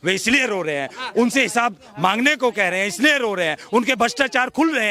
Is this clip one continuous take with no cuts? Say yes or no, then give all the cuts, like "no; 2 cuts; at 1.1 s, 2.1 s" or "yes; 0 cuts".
yes; 0 cuts